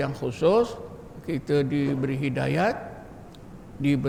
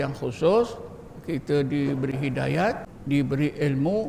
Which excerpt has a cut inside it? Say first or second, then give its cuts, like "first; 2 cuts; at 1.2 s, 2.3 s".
second; 1 cut; at 2.9 s